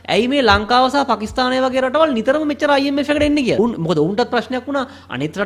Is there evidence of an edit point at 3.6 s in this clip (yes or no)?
yes